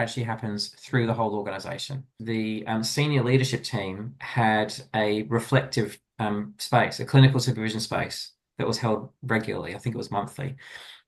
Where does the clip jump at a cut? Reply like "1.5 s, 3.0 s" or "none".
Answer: 2.1 s